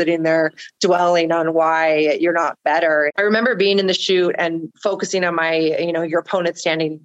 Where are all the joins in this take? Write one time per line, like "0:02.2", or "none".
0:03.1